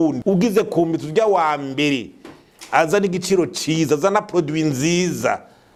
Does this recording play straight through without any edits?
yes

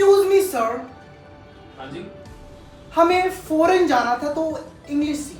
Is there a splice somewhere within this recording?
no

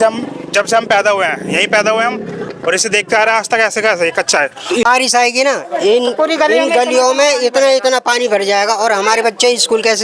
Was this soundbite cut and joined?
yes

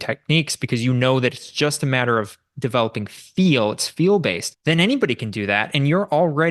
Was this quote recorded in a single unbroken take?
no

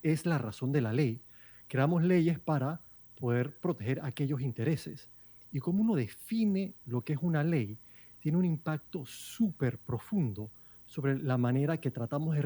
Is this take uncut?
yes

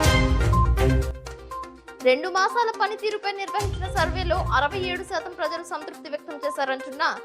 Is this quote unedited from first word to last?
yes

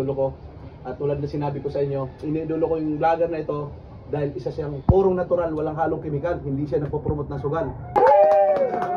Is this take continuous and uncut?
no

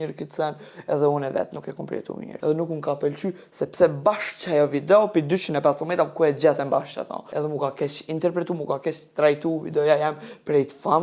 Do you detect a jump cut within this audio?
yes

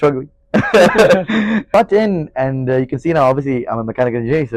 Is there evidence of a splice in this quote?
yes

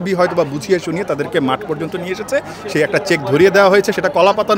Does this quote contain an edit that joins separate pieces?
no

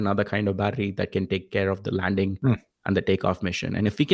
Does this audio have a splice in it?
no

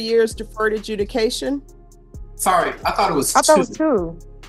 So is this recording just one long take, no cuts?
yes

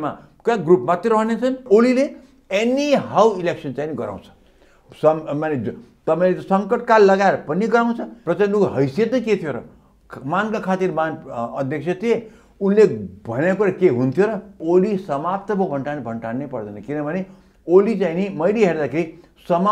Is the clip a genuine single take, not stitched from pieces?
no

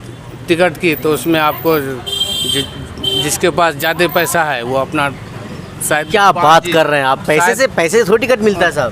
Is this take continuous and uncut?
yes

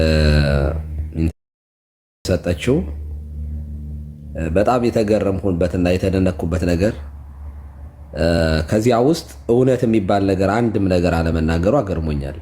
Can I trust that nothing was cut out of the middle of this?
yes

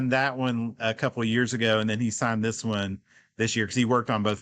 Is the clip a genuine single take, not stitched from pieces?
yes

